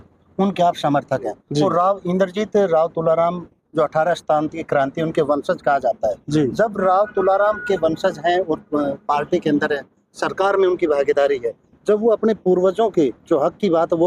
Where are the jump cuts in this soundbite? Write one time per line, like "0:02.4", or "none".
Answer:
none

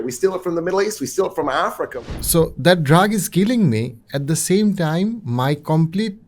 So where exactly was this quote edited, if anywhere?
0:01.9

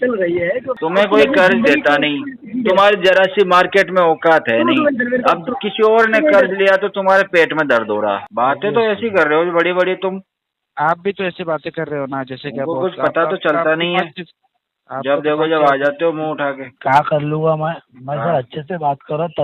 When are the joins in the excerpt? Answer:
0:00.8
0:08.3
0:16.7

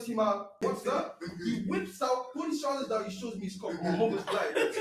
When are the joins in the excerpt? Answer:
none

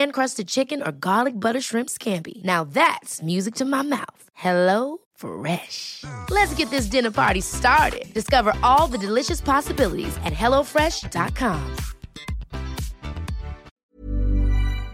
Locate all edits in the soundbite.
0:13.9

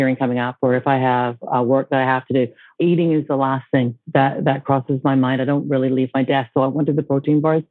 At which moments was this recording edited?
0:02.7

